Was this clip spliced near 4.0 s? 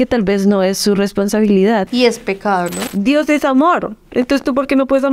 no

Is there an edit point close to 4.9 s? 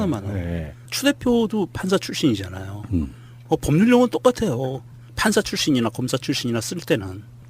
no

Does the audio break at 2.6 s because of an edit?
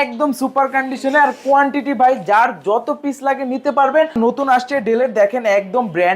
no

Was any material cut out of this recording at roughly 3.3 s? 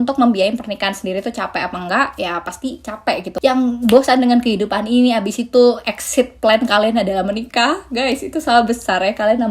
yes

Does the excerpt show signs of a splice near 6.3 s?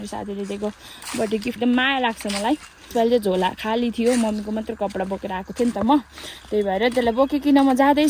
no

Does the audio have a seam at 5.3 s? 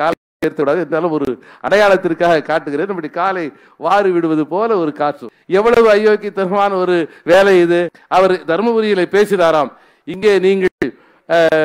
yes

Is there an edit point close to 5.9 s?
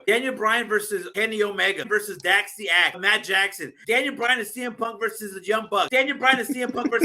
yes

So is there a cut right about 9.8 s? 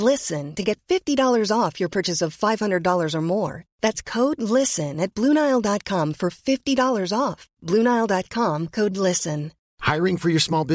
no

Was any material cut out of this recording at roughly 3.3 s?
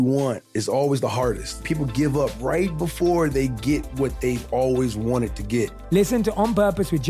no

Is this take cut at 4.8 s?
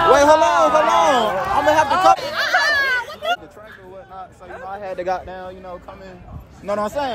no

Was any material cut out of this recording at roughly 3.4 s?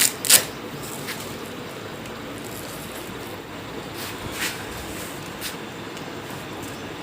yes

